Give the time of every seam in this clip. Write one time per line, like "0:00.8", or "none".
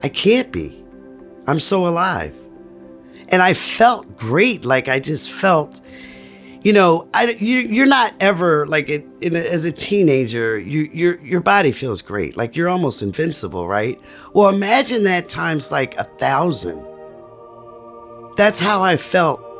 0:18.3